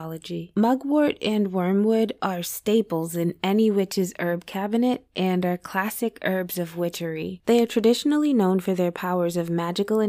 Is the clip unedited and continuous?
yes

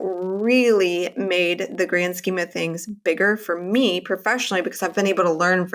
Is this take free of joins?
yes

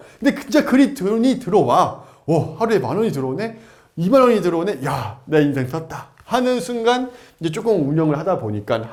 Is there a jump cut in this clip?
no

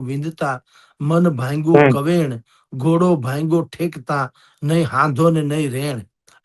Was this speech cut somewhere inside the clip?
no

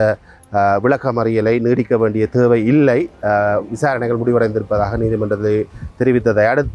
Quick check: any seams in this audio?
no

